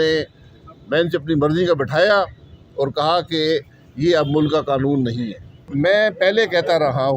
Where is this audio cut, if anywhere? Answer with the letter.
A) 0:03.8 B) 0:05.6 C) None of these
B